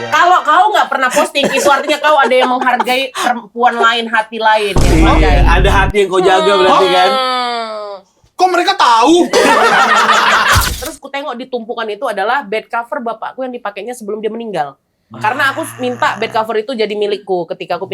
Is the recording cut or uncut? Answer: cut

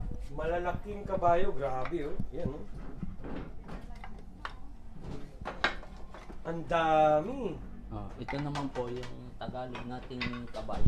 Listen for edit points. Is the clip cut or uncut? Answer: uncut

